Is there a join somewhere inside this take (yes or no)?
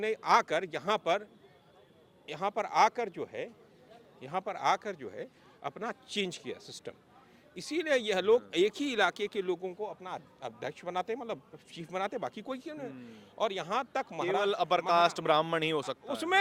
no